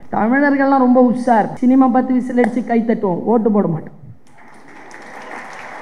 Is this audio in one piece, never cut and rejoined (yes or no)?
no